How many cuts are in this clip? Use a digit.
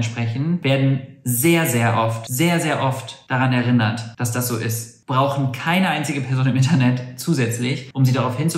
1